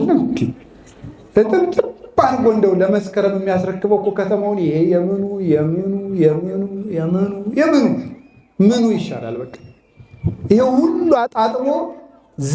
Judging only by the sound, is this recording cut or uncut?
uncut